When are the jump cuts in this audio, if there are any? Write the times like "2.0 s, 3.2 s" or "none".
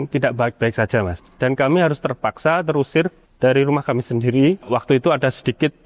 1.2 s, 3.2 s, 4.6 s